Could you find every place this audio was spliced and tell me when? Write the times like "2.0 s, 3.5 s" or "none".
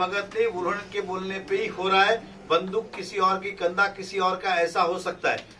none